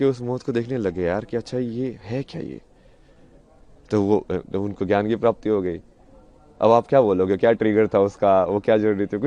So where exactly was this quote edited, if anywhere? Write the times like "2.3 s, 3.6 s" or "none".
none